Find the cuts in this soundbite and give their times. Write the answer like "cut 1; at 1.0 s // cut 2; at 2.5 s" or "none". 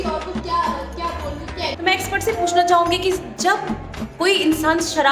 cut 1; at 1.7 s